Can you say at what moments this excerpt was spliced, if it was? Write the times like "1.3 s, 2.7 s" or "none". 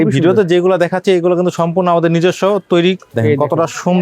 3.1 s